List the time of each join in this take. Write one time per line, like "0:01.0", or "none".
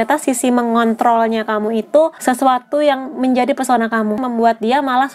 0:02.2
0:04.2